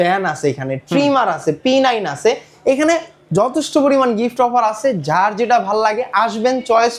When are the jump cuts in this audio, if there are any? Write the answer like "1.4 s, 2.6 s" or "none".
none